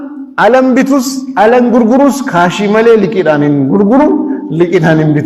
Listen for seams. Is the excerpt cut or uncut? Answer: uncut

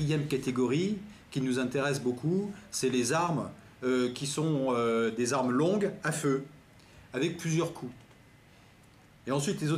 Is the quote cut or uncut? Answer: cut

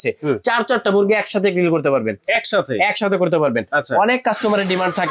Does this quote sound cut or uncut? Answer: uncut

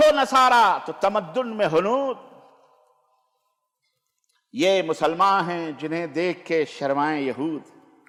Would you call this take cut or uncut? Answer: uncut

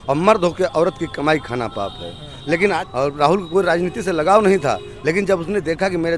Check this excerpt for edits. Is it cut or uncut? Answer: cut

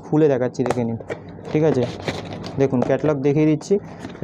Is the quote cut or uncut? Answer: uncut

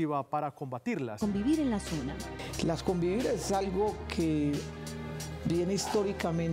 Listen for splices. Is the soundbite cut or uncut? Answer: uncut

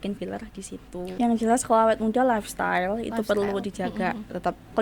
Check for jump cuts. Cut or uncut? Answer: cut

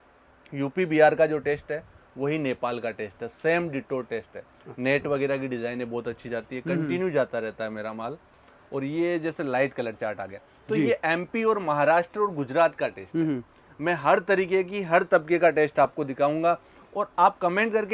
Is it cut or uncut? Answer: uncut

